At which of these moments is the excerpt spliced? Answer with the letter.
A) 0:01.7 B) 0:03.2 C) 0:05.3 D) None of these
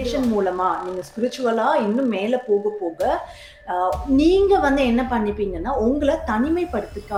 D